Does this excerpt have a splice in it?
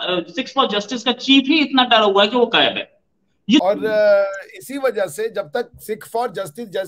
yes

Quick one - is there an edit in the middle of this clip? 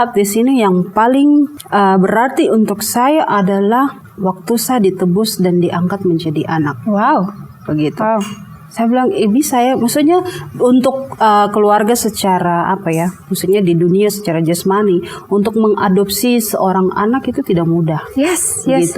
yes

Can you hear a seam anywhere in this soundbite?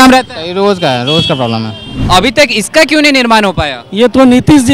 yes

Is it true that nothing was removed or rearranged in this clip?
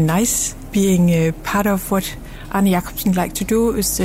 yes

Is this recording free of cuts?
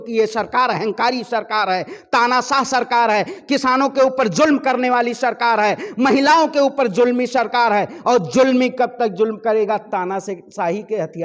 yes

